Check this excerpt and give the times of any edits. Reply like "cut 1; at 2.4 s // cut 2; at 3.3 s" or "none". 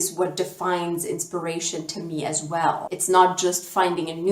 cut 1; at 2.9 s